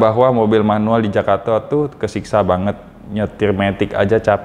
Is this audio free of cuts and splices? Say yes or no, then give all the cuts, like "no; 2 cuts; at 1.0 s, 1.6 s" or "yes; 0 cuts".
yes; 0 cuts